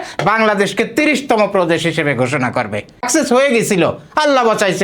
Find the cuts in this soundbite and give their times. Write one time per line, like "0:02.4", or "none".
0:03.0